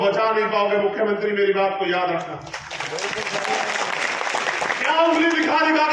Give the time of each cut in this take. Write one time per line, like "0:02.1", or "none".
none